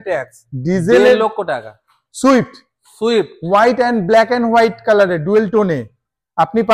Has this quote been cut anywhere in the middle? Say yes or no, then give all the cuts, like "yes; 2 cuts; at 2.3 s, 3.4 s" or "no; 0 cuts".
no; 0 cuts